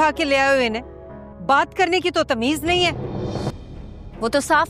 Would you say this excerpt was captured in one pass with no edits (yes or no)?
no